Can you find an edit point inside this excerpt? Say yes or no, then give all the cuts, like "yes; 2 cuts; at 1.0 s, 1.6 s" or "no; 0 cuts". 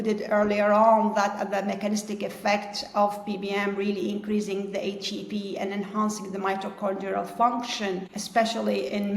yes; 1 cut; at 8.1 s